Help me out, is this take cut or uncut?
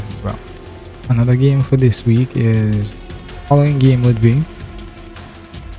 uncut